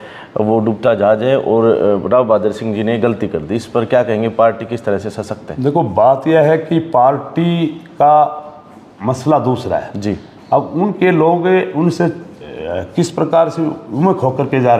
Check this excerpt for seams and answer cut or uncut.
uncut